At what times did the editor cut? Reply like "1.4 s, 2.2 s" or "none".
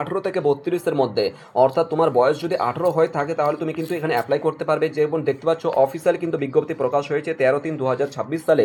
none